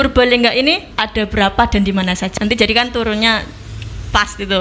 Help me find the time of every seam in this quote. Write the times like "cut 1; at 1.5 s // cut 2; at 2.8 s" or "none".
cut 1; at 0.9 s // cut 2; at 2.3 s